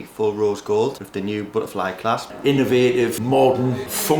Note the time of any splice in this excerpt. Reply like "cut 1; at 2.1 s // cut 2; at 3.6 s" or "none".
cut 1; at 2.3 s